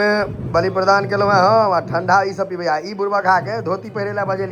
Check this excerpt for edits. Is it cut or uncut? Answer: uncut